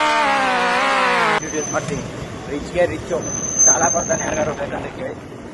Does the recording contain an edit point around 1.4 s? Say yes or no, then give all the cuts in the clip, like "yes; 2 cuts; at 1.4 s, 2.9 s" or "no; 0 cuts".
yes; 1 cut; at 1.4 s